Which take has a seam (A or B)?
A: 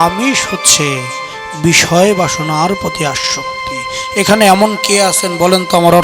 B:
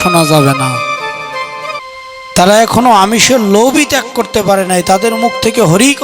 B